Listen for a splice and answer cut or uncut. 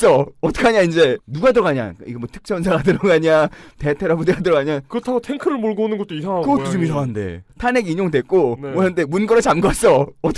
cut